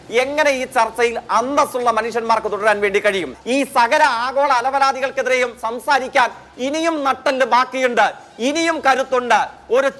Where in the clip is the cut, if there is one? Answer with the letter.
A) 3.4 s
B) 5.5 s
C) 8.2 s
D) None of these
A